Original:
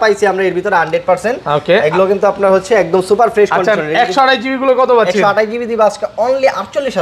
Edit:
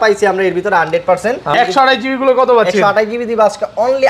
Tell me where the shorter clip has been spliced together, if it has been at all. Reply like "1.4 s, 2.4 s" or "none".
1.5 s